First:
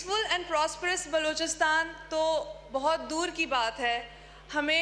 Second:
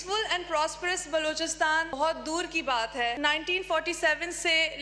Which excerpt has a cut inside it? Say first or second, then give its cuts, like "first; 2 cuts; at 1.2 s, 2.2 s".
second; 2 cuts; at 1.9 s, 3.2 s